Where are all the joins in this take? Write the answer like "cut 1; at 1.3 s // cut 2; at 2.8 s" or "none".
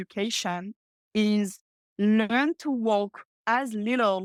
none

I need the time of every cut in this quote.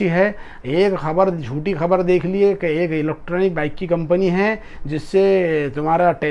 none

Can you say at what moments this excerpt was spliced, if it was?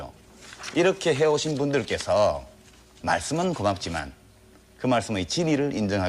cut 1; at 2.9 s

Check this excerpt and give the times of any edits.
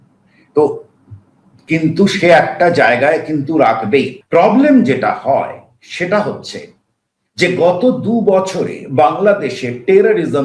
cut 1; at 4.2 s

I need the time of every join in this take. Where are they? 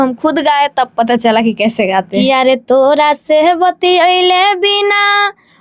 cut 1; at 2.1 s

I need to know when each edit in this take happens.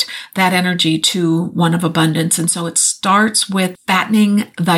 cut 1; at 3.8 s

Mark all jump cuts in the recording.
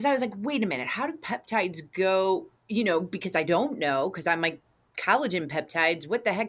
none

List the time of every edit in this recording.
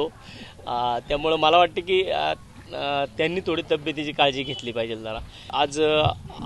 cut 1; at 5.5 s

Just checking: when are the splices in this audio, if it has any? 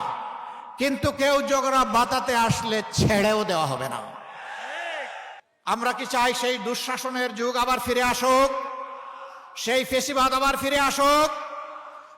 cut 1; at 5.5 s

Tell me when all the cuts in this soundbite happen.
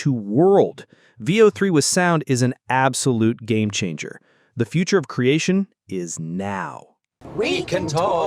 cut 1; at 7.2 s

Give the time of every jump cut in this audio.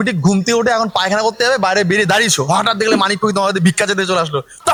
none

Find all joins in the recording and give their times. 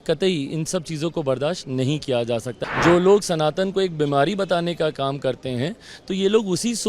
cut 1; at 2.6 s

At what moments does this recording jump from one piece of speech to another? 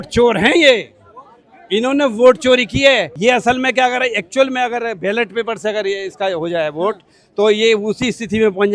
cut 1; at 3.1 s

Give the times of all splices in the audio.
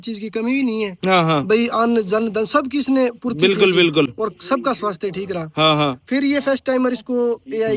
none

